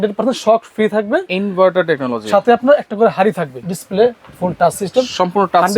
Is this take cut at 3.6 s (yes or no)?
yes